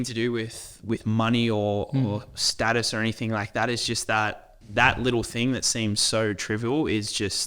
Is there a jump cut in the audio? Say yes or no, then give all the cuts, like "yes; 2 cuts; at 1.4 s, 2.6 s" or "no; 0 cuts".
yes; 1 cut; at 4.5 s